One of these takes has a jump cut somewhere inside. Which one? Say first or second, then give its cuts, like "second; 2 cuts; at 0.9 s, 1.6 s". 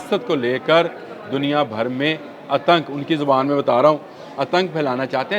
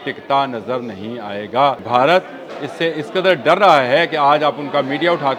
second; 1 cut; at 1.8 s